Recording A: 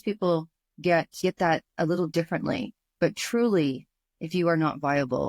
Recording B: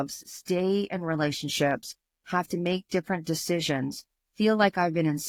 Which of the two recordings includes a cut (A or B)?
A